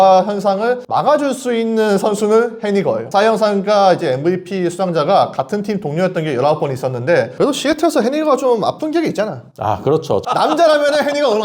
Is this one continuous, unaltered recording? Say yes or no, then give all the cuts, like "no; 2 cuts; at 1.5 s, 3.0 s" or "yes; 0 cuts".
no; 2 cuts; at 3.0 s, 7.3 s